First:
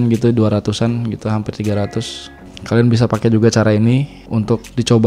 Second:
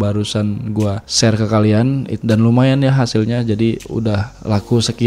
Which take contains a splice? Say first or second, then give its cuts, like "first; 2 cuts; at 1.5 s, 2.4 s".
second; 3 cuts; at 1.0 s, 2.1 s, 4.1 s